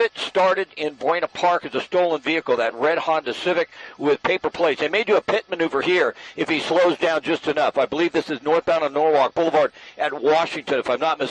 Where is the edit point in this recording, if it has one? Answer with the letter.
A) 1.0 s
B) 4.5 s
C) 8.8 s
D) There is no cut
C